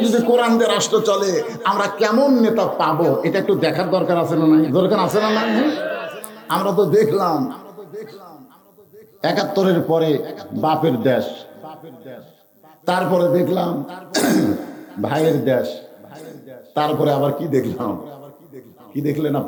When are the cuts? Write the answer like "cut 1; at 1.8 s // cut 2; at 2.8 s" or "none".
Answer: none